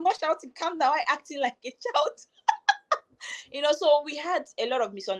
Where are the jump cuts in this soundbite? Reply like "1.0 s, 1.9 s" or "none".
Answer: none